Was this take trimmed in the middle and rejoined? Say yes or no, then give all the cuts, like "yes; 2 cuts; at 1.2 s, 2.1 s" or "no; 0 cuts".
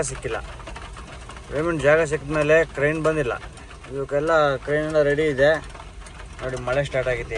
no; 0 cuts